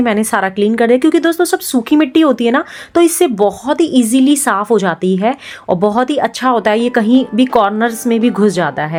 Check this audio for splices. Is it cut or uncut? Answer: uncut